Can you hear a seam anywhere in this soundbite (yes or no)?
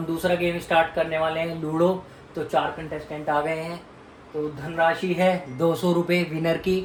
no